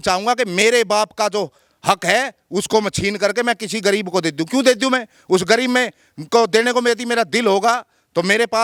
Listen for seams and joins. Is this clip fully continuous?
yes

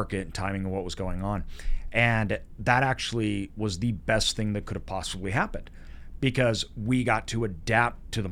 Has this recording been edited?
no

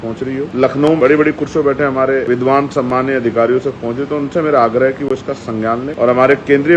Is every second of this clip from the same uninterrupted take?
no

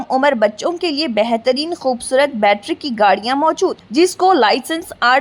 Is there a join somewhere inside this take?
no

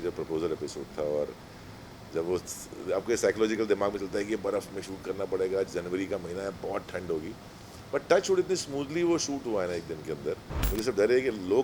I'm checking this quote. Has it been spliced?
yes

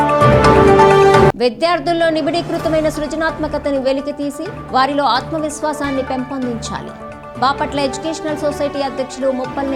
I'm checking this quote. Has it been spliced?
no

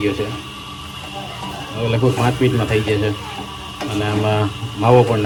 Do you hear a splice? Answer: no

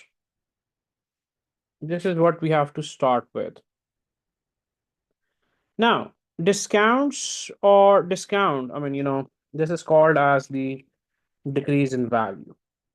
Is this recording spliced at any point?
no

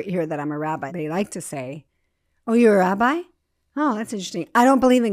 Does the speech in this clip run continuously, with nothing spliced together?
no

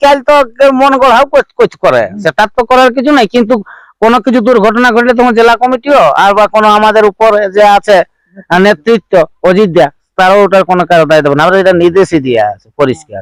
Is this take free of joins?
yes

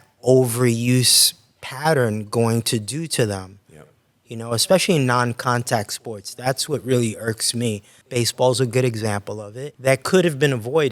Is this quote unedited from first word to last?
no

